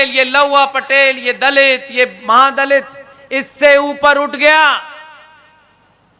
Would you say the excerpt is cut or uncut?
uncut